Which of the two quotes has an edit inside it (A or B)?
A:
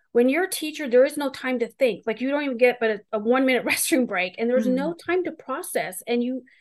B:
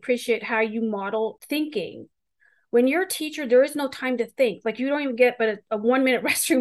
B